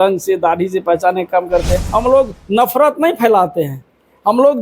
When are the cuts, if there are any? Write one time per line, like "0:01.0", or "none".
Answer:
0:01.8